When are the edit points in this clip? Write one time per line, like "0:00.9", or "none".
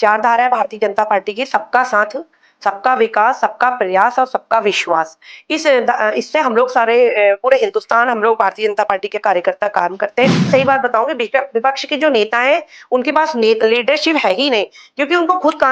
0:10.5